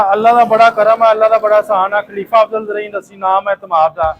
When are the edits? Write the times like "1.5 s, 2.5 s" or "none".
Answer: none